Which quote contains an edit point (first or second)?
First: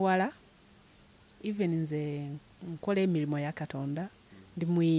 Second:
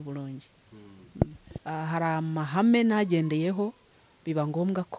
second